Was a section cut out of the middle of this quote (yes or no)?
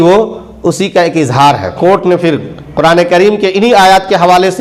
yes